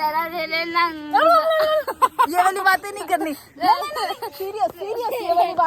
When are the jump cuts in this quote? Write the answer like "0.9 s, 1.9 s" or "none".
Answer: none

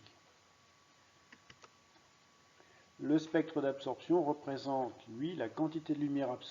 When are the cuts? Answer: 1.6 s

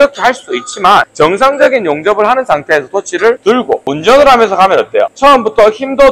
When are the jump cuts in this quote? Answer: 3.6 s, 5.1 s

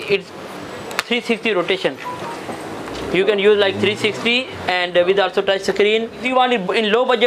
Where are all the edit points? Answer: 6.2 s

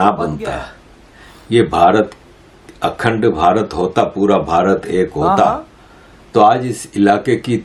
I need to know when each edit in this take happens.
none

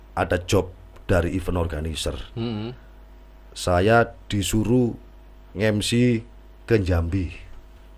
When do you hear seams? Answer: none

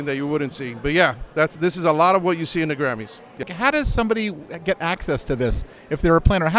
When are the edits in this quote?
none

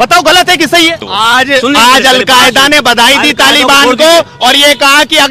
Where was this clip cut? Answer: 1.0 s

